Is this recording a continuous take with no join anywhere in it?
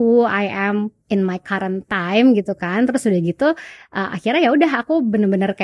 yes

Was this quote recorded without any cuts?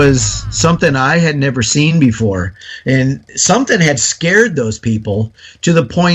yes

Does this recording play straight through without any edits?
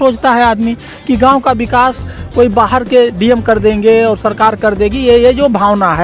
yes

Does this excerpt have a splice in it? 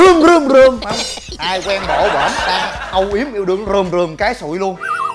yes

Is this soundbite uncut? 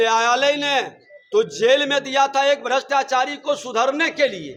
yes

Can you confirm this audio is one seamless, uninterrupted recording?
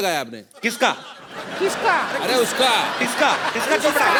yes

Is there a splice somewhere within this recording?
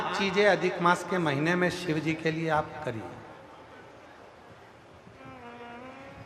no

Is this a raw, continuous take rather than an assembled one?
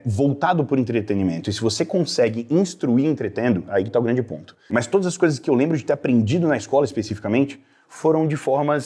no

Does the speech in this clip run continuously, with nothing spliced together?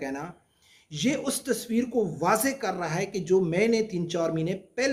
yes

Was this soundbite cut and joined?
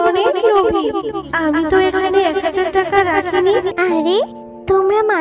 yes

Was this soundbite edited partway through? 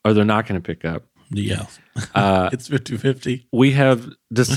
no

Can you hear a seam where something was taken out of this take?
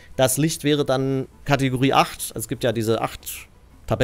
yes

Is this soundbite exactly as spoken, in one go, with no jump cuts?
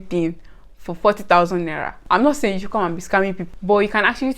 no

